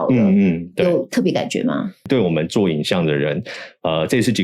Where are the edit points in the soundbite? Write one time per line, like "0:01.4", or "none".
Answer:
0:02.0